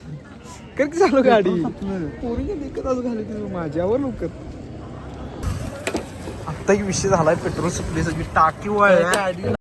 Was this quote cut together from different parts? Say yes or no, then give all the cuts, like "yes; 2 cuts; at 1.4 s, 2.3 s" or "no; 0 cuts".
no; 0 cuts